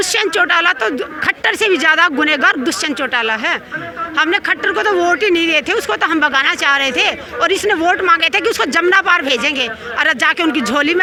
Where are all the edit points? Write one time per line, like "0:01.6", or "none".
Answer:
none